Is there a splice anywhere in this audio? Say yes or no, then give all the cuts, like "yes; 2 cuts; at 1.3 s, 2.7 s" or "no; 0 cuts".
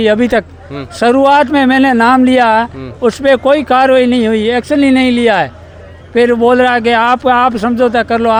no; 0 cuts